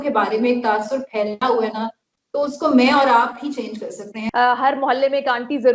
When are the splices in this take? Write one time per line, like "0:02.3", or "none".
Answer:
0:04.2